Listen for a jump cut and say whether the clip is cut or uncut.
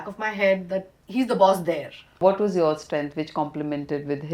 cut